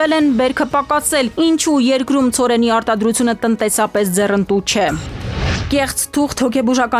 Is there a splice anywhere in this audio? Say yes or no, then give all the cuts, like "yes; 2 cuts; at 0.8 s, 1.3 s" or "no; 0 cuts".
yes; 1 cut; at 5.5 s